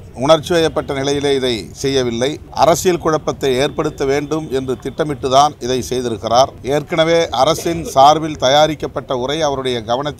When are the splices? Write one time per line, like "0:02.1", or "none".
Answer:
0:02.4
0:06.6